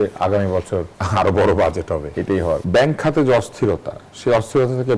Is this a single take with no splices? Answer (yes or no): no